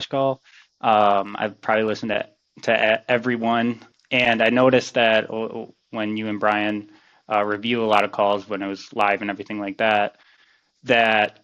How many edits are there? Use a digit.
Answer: 1